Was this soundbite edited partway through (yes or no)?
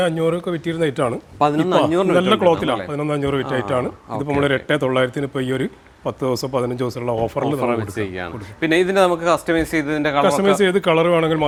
no